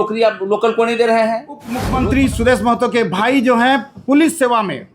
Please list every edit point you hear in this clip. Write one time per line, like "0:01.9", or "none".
0:01.8